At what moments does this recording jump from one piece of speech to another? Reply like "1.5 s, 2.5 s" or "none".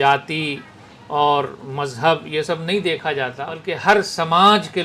3.6 s